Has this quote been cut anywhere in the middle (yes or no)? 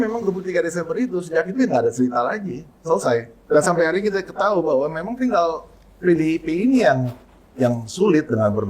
yes